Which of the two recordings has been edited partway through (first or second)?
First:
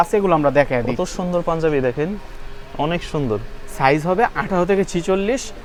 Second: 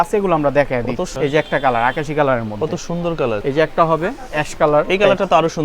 second